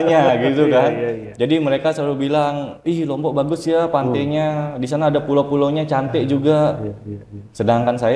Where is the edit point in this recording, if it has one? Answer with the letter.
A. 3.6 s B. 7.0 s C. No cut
C